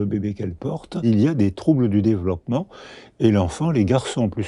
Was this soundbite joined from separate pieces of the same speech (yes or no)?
yes